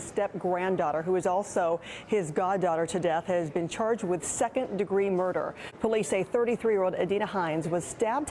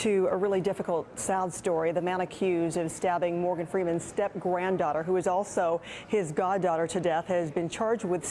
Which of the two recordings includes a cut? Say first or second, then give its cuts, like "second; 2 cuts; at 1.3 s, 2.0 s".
first; 1 cut; at 5.6 s